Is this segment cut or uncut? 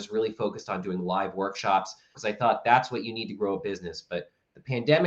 cut